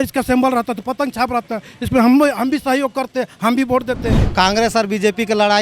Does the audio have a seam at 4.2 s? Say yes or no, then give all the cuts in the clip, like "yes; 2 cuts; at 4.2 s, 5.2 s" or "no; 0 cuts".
yes; 1 cut; at 4.2 s